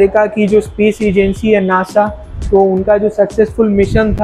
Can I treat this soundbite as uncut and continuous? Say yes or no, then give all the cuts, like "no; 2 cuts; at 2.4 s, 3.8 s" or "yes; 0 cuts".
yes; 0 cuts